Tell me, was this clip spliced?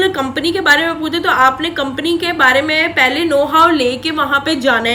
no; 0 cuts

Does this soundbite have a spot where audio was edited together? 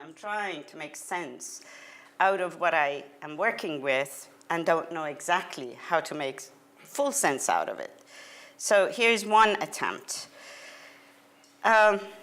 no; 0 cuts

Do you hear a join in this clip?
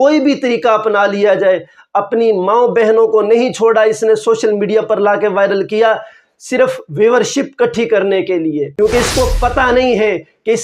yes; 1 cut; at 8.7 s

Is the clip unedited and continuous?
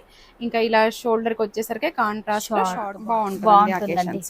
no; 1 cut; at 2.9 s

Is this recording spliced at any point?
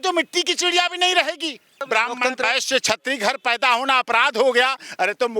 yes; 1 cut; at 1.8 s

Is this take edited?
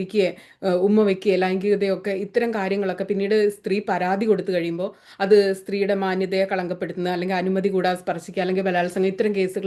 no; 0 cuts

